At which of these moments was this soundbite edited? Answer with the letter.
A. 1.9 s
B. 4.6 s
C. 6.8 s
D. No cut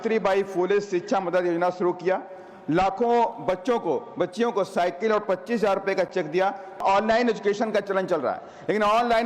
C